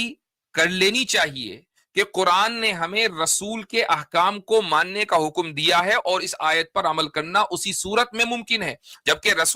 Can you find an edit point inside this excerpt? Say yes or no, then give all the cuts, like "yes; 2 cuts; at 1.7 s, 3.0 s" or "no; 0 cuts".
no; 0 cuts